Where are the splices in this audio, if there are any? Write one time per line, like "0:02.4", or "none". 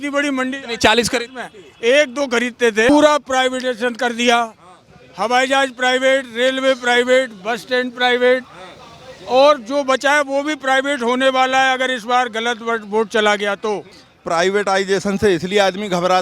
0:02.9
0:13.9